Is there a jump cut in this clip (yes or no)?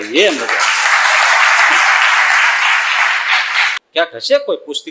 yes